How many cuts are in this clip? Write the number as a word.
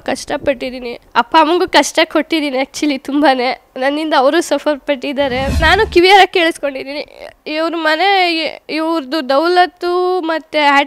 two